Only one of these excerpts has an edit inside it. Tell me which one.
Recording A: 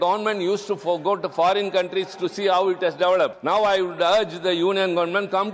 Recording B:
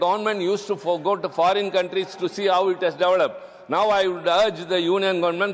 A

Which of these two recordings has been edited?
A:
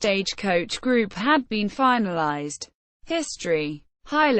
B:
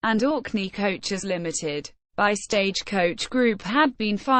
A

